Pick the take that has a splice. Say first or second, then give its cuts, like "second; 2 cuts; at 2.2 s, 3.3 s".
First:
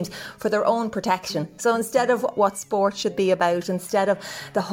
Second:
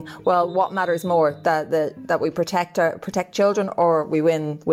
first; 1 cut; at 1.5 s